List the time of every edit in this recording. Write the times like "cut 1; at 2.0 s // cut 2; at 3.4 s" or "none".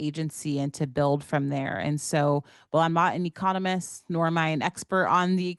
none